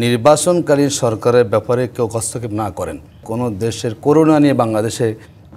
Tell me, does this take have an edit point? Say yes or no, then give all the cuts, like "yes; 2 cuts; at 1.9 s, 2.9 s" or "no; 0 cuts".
yes; 1 cut; at 3.3 s